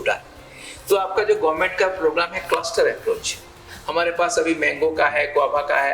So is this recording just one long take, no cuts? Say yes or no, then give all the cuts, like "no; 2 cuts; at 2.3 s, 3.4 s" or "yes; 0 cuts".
no; 1 cut; at 3.7 s